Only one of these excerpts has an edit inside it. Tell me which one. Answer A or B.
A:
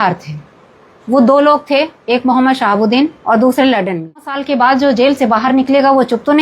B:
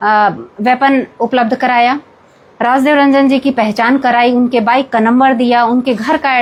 A